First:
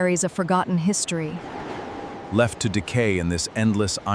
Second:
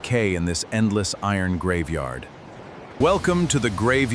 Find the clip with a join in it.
second; 1 cut; at 2.9 s

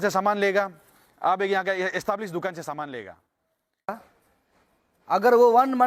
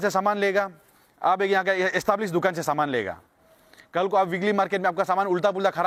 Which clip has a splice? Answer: first; 1 cut; at 3.9 s

